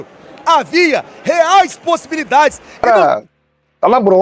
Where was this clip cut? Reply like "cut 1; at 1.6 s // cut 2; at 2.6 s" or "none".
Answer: cut 1; at 2.7 s